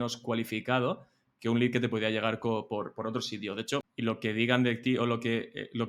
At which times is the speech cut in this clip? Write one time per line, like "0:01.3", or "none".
0:03.9